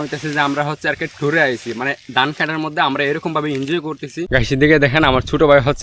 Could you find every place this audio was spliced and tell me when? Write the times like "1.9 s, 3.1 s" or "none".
4.3 s